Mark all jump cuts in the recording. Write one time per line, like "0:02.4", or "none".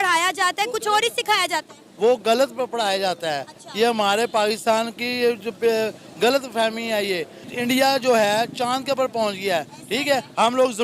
0:07.5